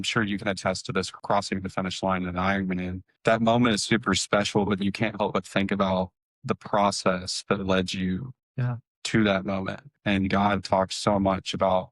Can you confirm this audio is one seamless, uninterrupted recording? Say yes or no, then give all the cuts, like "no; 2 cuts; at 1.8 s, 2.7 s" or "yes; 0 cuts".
no; 3 cuts; at 1.1 s, 3.2 s, 9.9 s